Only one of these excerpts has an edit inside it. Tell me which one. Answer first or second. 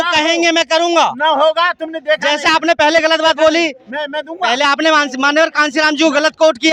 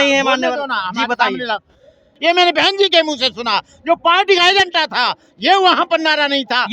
second